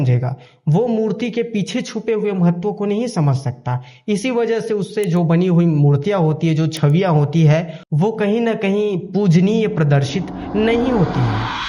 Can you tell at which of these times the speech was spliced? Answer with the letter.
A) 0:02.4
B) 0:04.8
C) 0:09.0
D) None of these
D